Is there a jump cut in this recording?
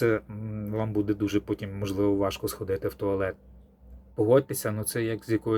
yes; 1 cut; at 4.1 s

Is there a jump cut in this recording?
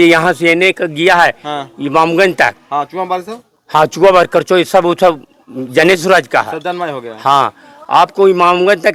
no; 0 cuts

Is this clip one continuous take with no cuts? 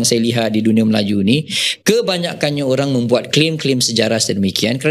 yes; 0 cuts

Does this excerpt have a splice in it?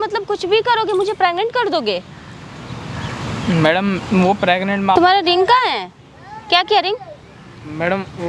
no; 0 cuts

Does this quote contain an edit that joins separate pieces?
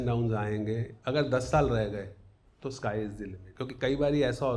yes; 2 cuts; at 0.9 s, 3.4 s

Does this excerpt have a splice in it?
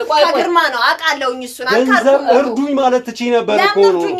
no; 0 cuts

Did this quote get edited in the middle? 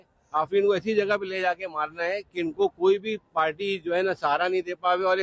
no; 0 cuts

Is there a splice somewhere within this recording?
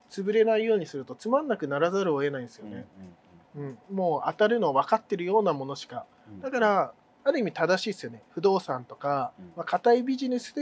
no; 0 cuts

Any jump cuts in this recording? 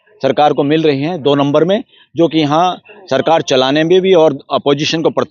no; 0 cuts

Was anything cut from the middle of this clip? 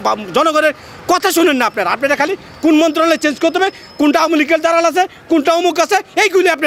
no; 0 cuts

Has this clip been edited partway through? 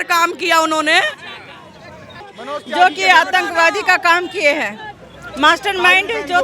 yes; 1 cut; at 2.2 s

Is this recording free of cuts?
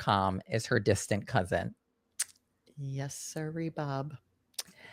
yes; 0 cuts

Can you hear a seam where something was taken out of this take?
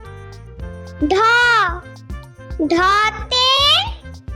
yes; 1 cut; at 1.0 s

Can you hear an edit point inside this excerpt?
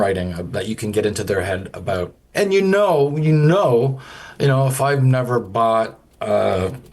yes; 1 cut; at 2.2 s

